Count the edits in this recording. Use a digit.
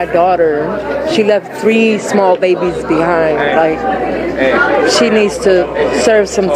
0